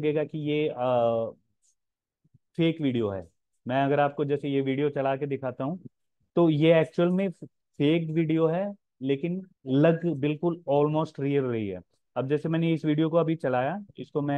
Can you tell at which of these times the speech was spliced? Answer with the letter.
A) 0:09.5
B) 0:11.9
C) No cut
A